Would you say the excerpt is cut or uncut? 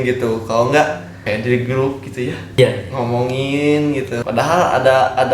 cut